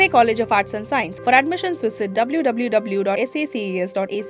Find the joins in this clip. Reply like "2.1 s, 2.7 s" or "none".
none